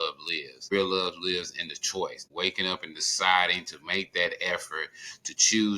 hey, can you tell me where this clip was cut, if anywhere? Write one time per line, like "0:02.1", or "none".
0:00.7
0:02.2